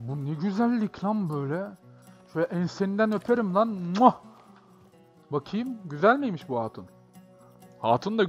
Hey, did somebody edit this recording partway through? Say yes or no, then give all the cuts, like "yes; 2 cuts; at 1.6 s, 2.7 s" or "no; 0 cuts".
no; 0 cuts